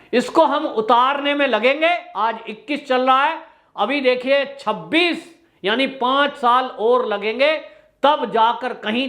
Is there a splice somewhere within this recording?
no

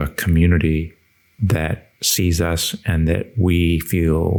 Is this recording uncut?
yes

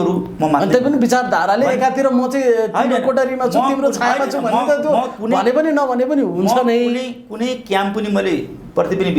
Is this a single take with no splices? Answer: yes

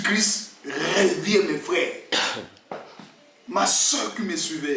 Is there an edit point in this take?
no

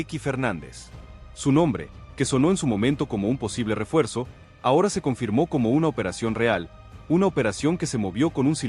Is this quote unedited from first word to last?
no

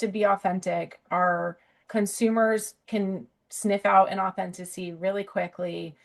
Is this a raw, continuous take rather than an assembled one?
yes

